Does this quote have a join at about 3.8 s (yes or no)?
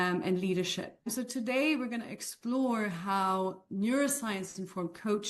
no